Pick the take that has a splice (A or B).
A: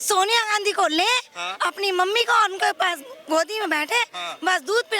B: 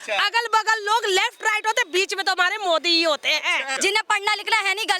B